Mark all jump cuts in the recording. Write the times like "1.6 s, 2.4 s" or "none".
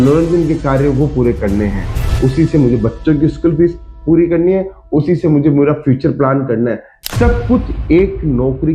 none